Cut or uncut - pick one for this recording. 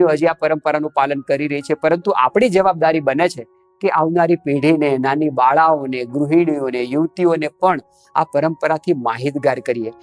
uncut